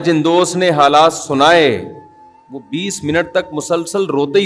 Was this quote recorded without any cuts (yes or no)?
yes